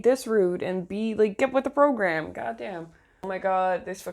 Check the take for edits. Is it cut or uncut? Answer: cut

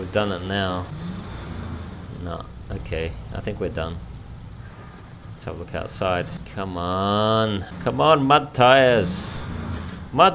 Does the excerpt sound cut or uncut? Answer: cut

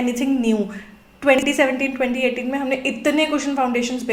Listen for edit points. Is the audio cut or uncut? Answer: uncut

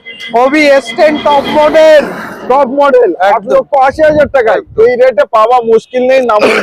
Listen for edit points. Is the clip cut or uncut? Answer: uncut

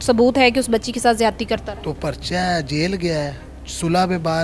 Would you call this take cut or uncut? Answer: uncut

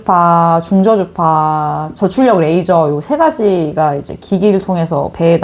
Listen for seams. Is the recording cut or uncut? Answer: uncut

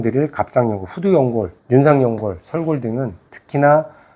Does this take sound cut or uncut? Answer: cut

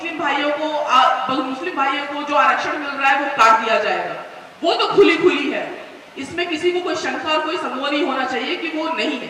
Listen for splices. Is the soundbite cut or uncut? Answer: uncut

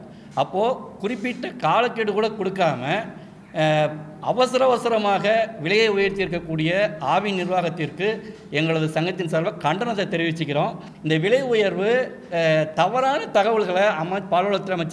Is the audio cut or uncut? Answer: cut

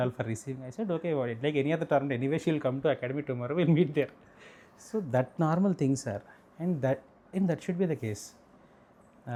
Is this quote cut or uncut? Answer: uncut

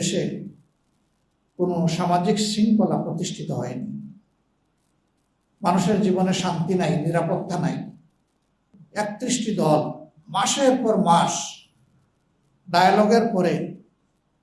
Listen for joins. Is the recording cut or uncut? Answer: cut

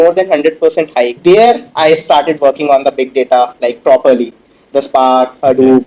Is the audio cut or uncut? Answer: uncut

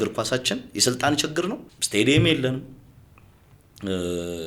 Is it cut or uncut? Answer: cut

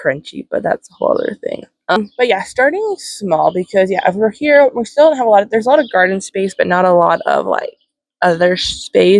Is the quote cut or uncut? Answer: cut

